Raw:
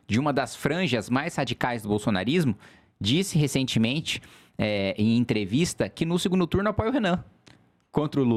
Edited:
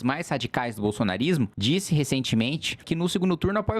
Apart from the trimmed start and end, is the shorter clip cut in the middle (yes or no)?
yes